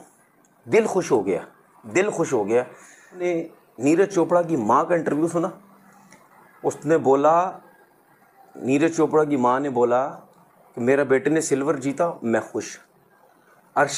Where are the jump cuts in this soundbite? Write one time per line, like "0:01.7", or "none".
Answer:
0:03.2